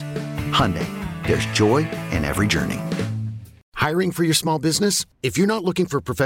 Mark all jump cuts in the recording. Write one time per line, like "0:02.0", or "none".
0:03.5